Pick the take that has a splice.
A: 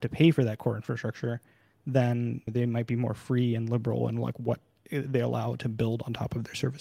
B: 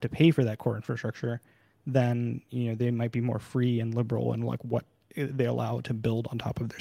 A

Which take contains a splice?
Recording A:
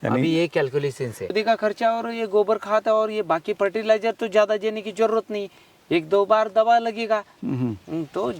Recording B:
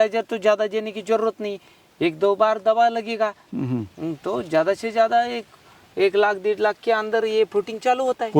A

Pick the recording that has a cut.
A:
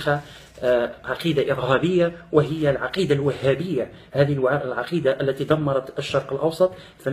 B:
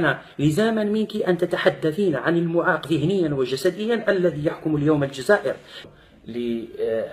B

